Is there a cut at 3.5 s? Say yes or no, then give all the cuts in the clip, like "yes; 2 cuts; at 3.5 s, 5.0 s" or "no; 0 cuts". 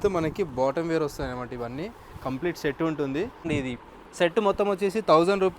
yes; 1 cut; at 3.5 s